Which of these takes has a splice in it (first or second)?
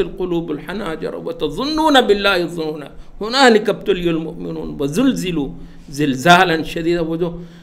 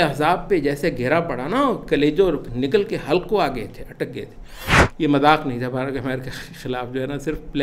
second